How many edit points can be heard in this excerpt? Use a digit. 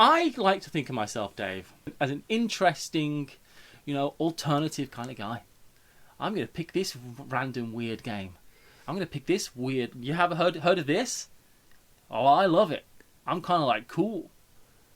1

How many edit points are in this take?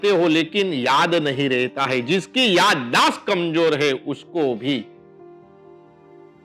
0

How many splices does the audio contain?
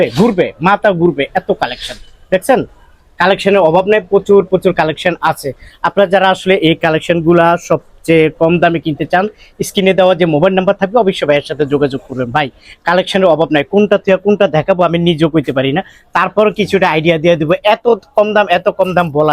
0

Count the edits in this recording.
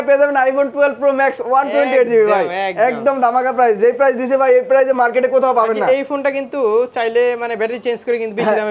0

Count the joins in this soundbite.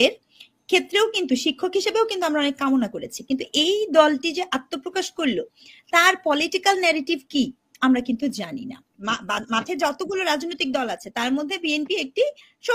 1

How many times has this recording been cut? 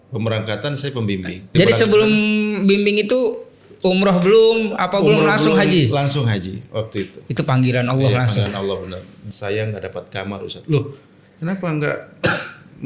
2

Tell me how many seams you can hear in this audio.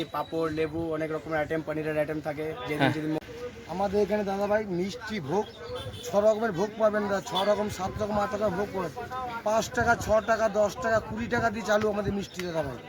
1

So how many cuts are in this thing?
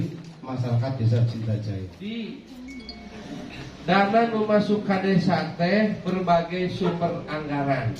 1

